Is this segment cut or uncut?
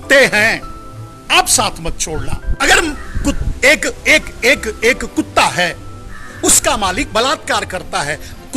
cut